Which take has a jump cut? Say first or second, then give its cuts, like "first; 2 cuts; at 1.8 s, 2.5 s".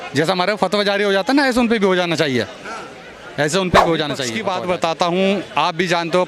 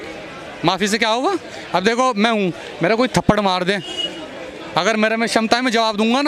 first; 1 cut; at 4.3 s